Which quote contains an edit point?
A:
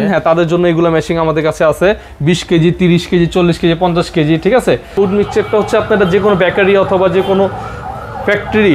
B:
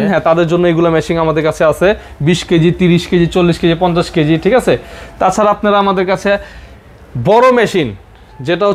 A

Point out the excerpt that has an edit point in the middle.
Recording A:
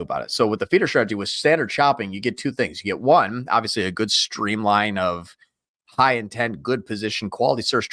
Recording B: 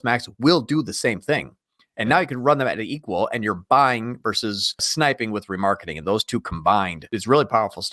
B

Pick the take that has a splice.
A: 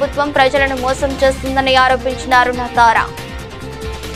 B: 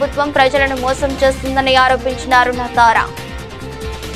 B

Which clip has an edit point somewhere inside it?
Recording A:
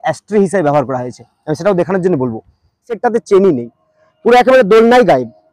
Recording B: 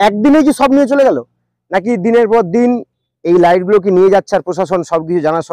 A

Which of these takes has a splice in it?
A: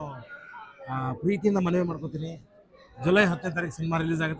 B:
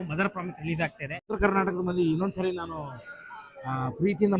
B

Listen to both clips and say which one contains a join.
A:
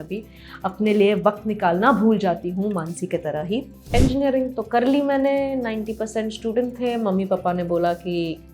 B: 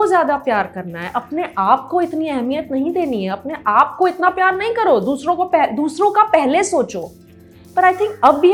A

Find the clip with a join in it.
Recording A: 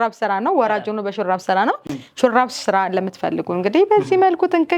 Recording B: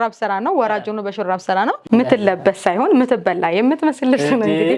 B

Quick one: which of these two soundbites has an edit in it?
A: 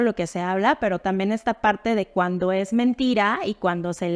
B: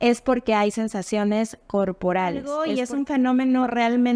B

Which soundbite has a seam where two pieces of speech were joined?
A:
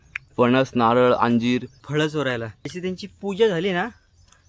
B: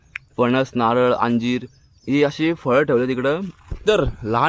A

